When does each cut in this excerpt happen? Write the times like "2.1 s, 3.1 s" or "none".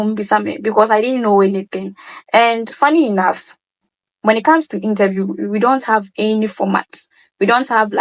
none